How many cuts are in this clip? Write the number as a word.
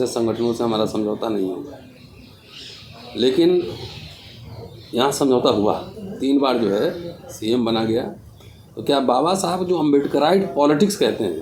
zero